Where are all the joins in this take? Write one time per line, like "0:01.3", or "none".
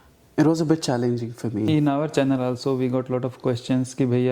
0:01.7